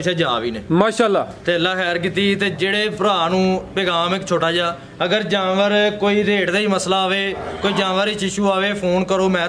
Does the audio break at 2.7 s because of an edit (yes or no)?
no